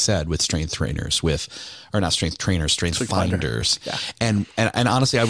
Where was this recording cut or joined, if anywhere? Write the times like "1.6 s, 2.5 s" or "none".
none